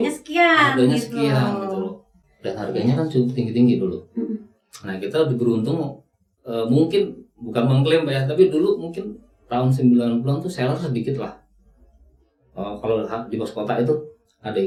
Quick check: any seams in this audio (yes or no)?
no